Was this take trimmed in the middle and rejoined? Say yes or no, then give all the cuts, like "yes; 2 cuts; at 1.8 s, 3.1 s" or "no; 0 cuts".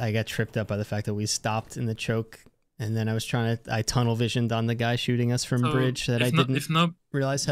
no; 0 cuts